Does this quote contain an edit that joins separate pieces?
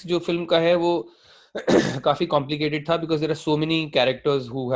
no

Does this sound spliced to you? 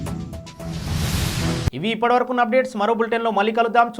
no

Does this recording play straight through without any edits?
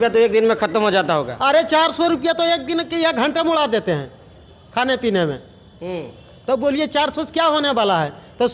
yes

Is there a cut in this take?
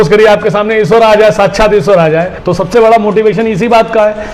yes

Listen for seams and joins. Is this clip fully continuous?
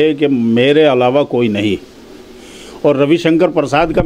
yes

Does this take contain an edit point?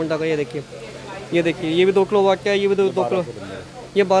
no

